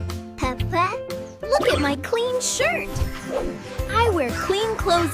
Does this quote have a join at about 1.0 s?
yes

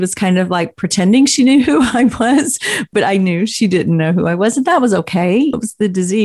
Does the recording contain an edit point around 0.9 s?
no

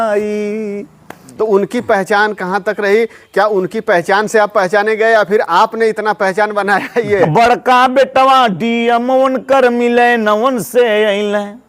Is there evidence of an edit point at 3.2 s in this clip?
no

